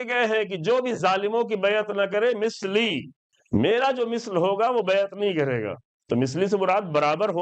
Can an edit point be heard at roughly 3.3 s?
yes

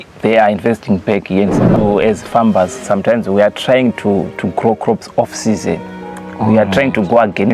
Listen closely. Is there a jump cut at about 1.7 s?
yes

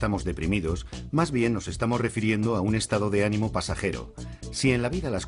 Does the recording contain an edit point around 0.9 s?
yes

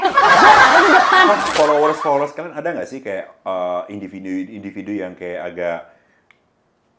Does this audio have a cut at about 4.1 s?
no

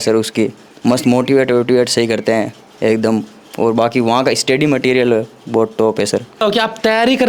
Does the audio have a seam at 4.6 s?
no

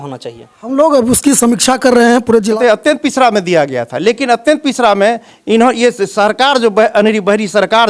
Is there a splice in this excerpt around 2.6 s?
yes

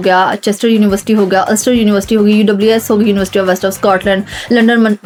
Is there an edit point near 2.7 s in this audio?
no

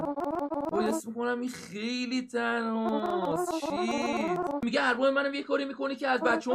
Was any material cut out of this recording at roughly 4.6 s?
yes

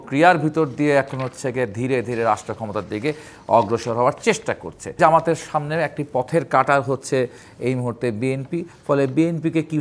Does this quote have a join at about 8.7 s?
yes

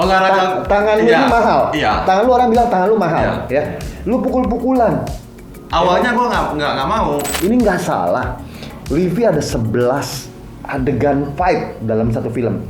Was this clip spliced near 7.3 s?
yes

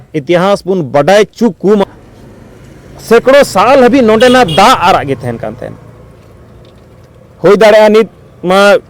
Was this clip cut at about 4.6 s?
no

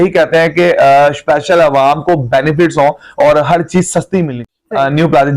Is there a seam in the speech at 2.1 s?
no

